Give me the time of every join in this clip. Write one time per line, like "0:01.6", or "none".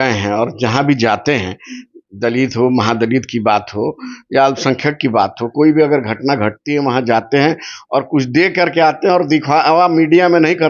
0:05.5